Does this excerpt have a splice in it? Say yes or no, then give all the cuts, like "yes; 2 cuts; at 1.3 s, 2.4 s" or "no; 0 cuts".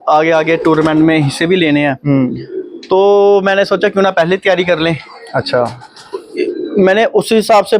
no; 0 cuts